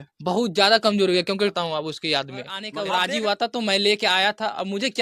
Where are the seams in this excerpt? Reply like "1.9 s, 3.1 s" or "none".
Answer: 1.5 s, 2.6 s

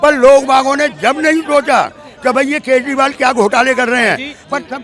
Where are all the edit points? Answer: none

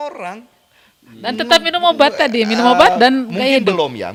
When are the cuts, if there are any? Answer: none

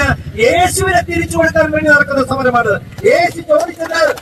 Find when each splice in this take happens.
none

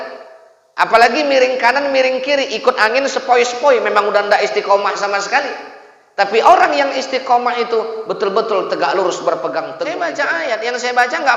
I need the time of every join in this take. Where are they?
9.9 s

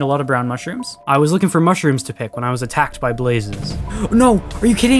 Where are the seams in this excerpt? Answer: 0.9 s

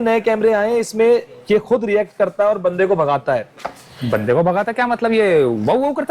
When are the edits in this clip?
none

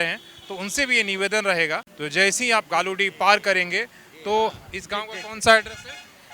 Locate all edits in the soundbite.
1.8 s

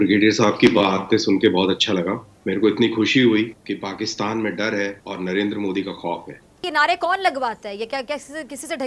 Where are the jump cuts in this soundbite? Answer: 2.3 s, 3.6 s, 5.0 s, 6.6 s

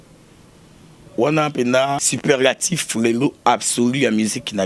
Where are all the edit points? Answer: 2.1 s

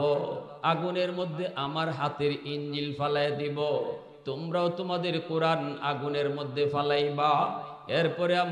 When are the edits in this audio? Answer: none

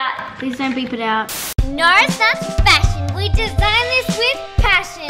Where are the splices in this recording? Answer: 1.5 s

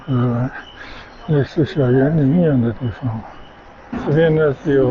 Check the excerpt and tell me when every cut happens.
4.0 s

